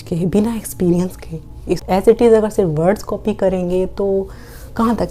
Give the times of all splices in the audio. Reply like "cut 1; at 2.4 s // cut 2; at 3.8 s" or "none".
cut 1; at 2.0 s